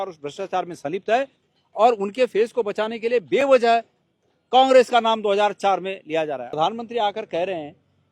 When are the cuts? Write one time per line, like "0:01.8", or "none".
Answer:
0:06.5